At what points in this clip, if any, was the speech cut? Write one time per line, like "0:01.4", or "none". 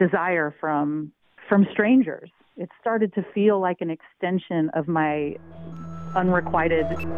0:01.3